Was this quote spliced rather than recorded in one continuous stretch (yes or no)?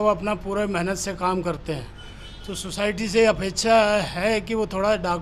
no